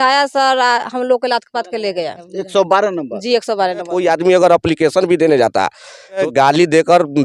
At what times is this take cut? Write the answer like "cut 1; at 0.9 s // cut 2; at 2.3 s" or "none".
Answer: cut 1; at 2.3 s // cut 2; at 3.9 s // cut 3; at 6.2 s